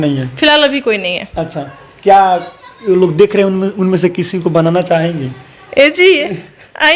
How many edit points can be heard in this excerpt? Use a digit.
0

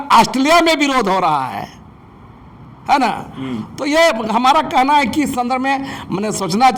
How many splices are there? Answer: 0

